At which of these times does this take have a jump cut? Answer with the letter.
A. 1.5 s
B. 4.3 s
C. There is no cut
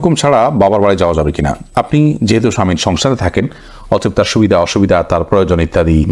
C